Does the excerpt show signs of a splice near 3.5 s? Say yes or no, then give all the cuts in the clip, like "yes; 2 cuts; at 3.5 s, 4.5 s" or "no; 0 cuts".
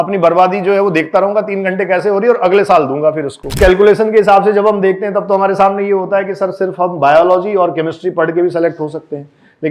yes; 1 cut; at 3.5 s